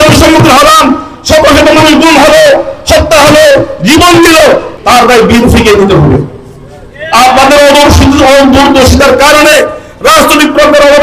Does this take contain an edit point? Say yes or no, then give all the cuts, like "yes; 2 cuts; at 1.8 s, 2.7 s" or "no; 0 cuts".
yes; 1 cut; at 4.7 s